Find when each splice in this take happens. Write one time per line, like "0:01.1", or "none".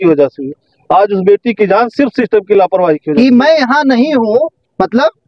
0:03.1